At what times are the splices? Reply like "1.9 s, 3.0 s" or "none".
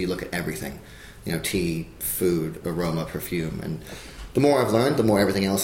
none